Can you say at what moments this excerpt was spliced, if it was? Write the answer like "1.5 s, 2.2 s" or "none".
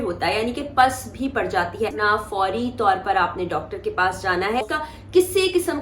2.0 s, 4.7 s